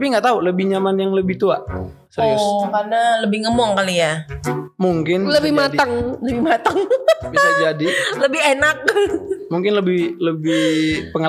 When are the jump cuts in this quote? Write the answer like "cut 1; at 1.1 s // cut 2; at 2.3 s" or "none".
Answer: none